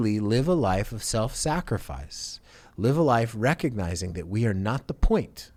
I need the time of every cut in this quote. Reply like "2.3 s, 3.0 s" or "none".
none